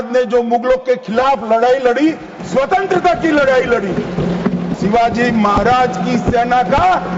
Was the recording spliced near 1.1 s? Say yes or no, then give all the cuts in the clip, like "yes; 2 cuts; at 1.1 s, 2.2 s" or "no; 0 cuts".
no; 1 cut; at 4.8 s